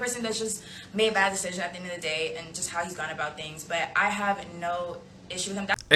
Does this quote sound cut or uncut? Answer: uncut